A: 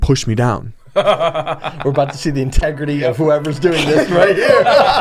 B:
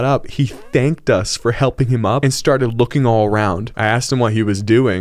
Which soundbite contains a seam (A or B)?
B